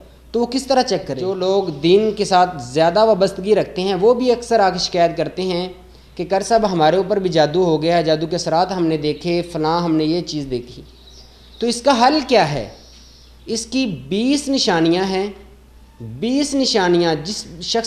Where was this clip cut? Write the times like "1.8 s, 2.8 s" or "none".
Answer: 1.2 s